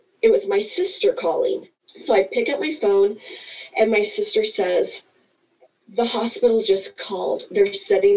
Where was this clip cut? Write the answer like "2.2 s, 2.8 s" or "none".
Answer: 1.7 s